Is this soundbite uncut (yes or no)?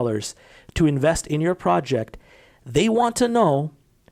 yes